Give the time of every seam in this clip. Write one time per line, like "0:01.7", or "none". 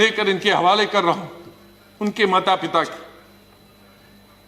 none